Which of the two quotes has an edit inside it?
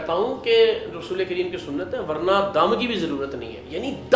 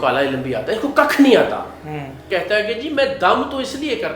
second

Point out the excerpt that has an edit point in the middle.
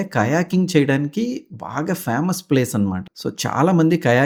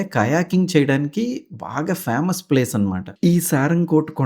second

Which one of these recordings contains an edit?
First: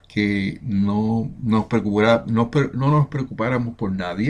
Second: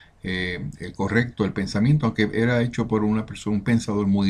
second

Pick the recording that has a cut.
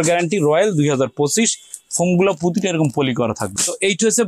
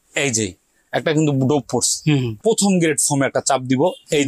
second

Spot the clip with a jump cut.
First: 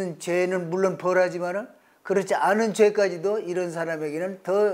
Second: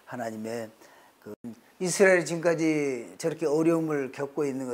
second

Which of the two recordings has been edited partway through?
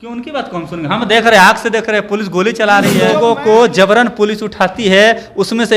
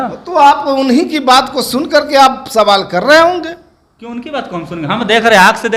first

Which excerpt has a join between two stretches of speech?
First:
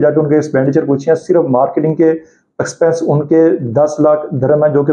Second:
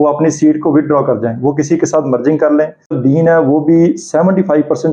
second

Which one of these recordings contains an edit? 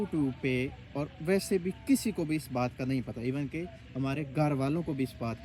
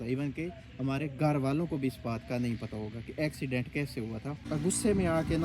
second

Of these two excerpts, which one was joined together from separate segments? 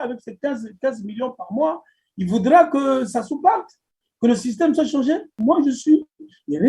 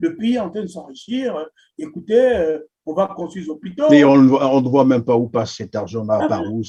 first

